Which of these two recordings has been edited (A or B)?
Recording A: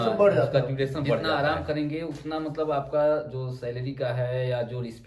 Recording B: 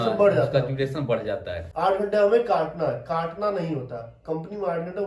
B